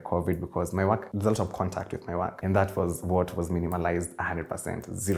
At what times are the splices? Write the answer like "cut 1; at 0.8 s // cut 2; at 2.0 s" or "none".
cut 1; at 1.1 s // cut 2; at 2.4 s